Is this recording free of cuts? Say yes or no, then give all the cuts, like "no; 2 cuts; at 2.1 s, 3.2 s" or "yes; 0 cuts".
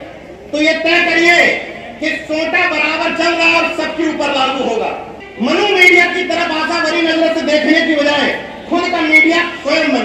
no; 1 cut; at 5.2 s